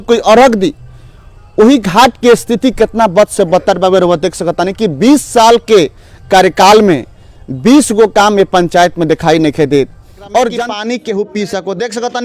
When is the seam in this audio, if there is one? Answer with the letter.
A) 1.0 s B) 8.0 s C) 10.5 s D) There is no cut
C